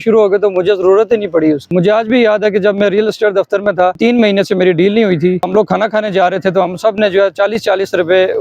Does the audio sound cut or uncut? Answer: cut